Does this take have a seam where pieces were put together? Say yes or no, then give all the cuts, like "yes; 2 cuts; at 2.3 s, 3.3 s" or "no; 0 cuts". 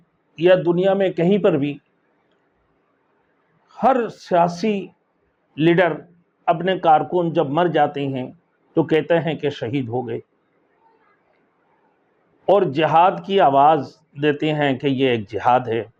no; 0 cuts